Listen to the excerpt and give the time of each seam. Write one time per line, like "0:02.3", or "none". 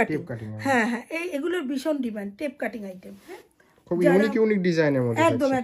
0:03.4

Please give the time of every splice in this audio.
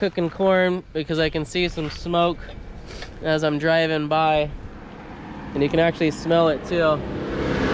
none

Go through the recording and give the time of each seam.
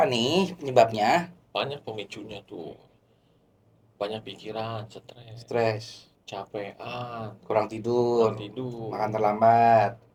none

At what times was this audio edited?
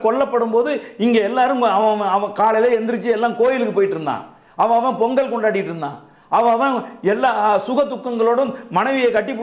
none

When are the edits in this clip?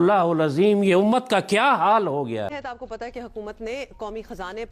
0:02.5

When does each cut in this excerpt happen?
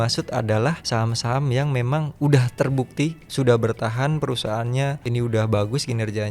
0:00.8
0:03.2
0:05.0

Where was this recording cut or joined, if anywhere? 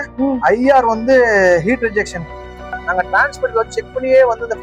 0:02.6

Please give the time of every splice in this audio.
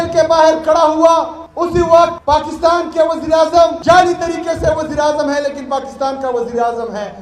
0:01.4
0:02.2
0:03.8

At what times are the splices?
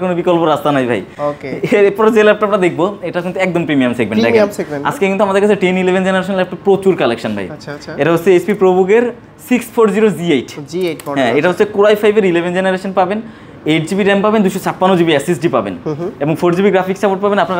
none

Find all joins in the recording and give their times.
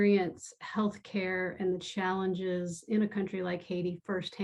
none

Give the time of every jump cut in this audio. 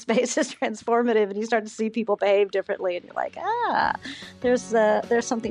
none

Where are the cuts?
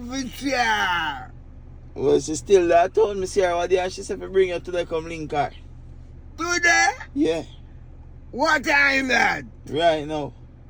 none

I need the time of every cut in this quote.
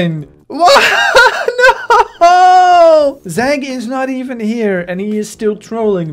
0:03.2

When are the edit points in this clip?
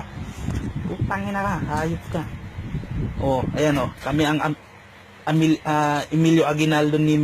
0:05.6

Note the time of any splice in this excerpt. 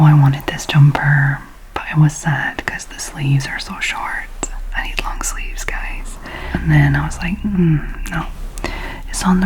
0:06.4

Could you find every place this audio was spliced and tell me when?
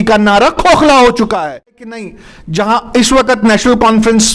0:02.0

